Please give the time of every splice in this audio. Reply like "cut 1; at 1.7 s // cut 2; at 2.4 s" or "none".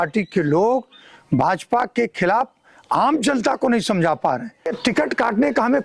cut 1; at 4.8 s